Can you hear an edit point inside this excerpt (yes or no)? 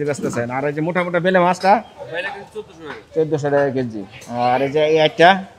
no